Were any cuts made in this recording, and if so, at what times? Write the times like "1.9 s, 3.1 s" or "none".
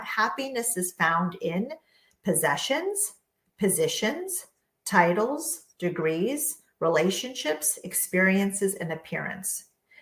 none